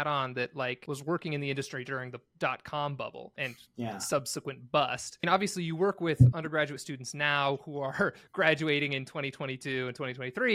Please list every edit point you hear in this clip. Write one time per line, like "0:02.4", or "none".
0:00.8
0:03.3
0:05.2